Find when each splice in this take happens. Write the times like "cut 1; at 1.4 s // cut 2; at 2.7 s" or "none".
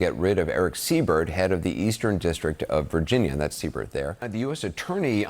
cut 1; at 4.2 s